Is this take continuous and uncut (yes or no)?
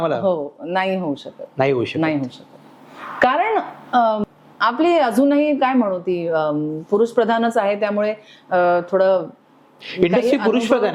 no